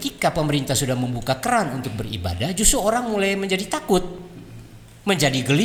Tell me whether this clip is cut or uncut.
uncut